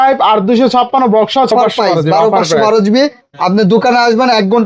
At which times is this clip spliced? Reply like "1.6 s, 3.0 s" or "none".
1.5 s